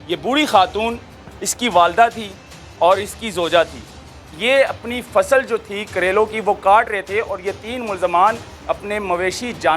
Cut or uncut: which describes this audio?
cut